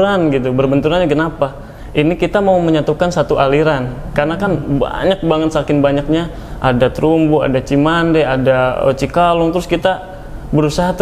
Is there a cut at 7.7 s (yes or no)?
no